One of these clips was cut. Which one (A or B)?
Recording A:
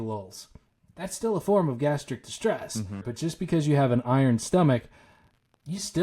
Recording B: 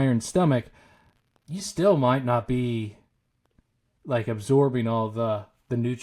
A